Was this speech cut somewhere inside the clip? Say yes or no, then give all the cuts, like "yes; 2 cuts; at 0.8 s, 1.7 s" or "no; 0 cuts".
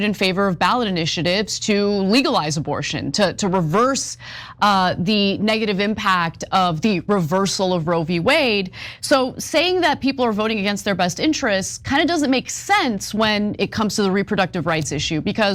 no; 0 cuts